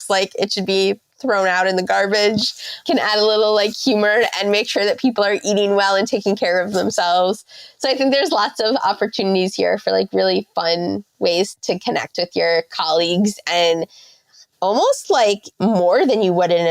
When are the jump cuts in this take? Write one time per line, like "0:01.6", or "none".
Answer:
0:15.5